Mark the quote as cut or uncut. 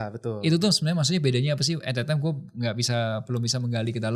uncut